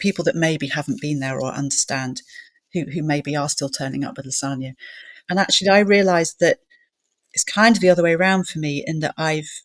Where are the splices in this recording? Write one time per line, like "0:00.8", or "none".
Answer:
0:05.2